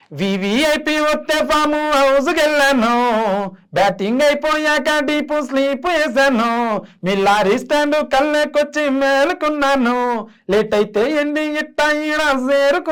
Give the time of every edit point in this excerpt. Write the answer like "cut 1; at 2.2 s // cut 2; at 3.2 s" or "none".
none